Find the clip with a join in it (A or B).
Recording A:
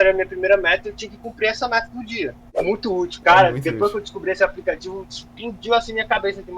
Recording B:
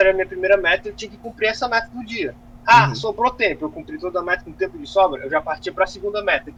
A